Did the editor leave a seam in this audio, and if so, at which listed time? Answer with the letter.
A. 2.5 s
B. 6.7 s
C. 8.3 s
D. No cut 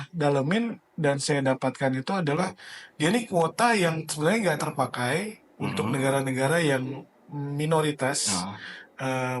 D